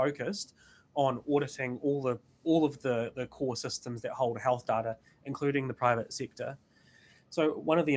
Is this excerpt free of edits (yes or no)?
yes